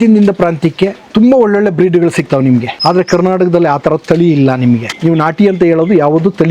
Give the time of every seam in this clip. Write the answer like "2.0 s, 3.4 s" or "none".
1.0 s, 2.7 s, 4.9 s